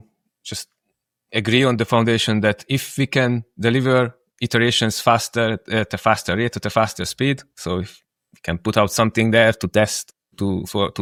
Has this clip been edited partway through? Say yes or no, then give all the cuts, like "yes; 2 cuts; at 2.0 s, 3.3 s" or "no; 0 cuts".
no; 0 cuts